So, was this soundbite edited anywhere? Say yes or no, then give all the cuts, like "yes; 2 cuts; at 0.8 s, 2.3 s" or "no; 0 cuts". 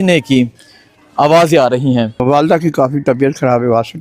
yes; 1 cut; at 2.2 s